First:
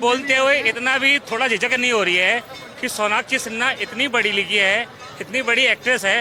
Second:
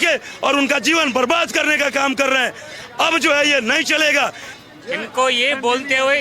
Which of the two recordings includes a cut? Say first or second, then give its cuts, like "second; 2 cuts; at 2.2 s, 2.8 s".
second; 1 cut; at 4.4 s